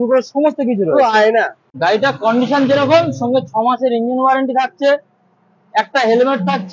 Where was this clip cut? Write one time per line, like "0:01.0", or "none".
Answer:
0:01.6